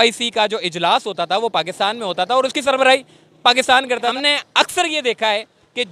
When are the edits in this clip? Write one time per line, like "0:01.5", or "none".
0:04.1